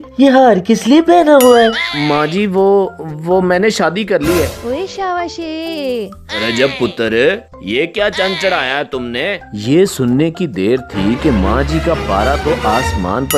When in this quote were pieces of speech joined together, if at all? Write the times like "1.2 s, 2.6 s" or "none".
1.8 s, 4.6 s, 9.4 s

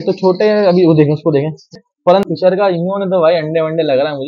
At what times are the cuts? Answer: 2.2 s

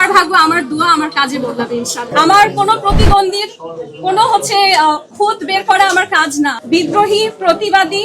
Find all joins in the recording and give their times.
2.1 s, 6.6 s

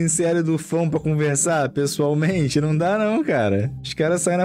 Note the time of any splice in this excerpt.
none

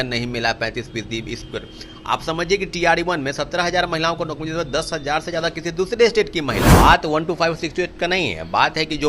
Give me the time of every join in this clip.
6.7 s

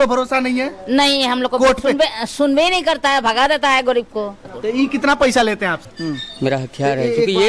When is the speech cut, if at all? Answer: 4.4 s, 5.8 s

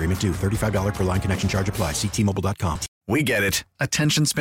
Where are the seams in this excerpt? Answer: 2.9 s

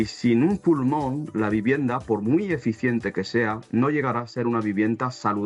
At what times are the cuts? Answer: none

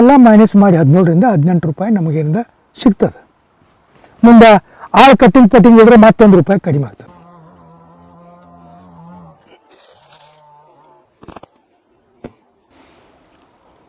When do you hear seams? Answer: 12.7 s

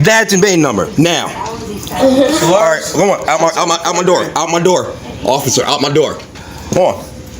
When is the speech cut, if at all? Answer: 6.3 s

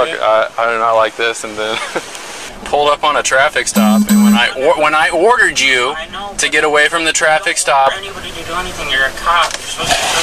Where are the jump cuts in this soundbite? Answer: 2.5 s

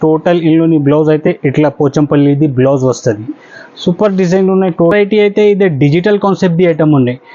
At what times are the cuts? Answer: 4.9 s

